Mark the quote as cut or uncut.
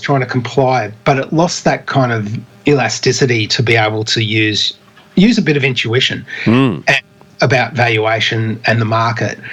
uncut